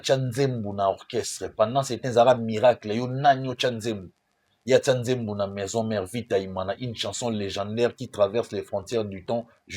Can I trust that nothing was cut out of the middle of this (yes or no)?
yes